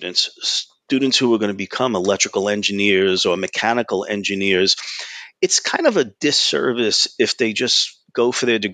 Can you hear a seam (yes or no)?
no